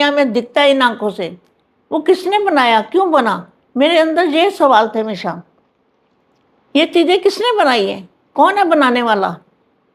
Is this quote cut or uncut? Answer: uncut